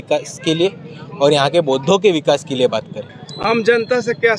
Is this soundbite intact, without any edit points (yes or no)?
yes